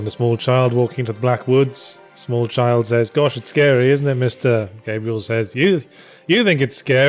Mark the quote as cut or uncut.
uncut